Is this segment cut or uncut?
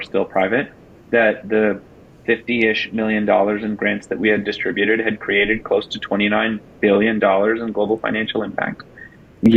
uncut